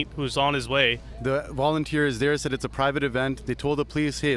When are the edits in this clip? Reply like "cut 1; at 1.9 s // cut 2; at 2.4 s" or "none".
cut 1; at 1.1 s